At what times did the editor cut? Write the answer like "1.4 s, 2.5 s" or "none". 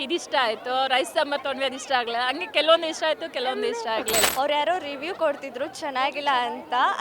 4.2 s